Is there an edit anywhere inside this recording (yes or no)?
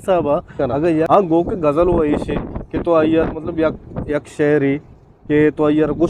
yes